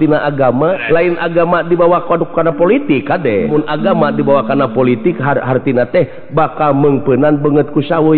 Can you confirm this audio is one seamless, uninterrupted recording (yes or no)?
no